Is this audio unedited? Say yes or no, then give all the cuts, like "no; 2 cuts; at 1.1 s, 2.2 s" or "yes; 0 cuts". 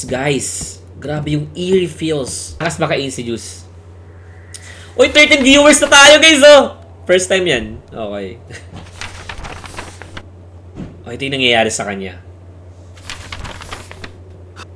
no; 1 cut; at 2.6 s